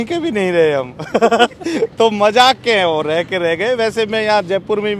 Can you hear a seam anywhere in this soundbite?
no; 0 cuts

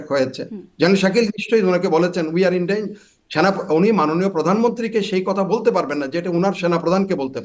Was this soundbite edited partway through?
no; 0 cuts

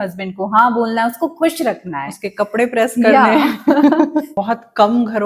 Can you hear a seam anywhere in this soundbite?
yes; 1 cut; at 4.3 s

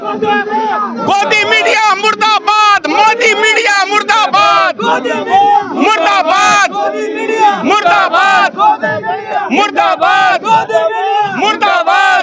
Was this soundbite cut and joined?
no; 0 cuts

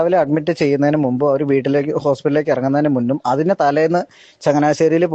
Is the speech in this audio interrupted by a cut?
no; 0 cuts

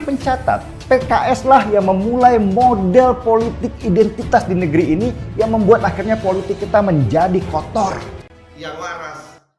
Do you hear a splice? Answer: yes; 1 cut; at 8.1 s

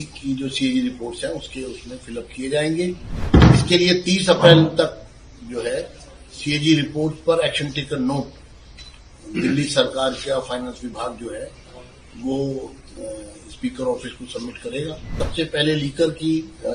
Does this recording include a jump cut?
yes; 2 cuts; at 3.1 s, 15.2 s

